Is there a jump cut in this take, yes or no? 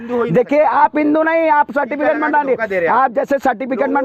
no